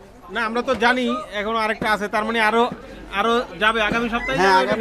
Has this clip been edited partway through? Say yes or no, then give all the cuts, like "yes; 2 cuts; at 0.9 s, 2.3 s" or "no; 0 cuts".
no; 0 cuts